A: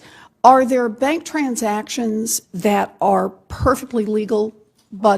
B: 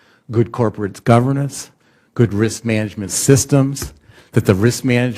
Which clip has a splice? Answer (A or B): A